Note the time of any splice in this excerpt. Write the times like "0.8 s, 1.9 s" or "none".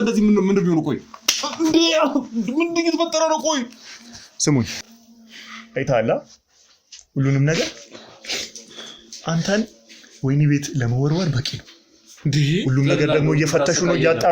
4.8 s